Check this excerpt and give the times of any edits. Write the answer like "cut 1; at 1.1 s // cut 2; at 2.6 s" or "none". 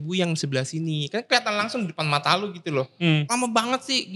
cut 1; at 3.3 s